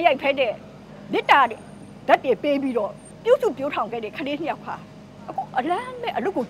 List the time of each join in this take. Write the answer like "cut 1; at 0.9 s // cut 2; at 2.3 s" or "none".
cut 1; at 3.0 s